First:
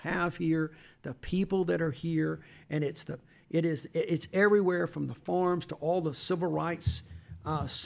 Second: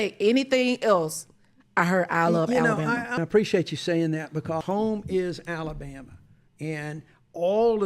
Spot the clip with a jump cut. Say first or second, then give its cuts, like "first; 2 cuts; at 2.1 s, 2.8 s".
second; 2 cuts; at 3.2 s, 4.6 s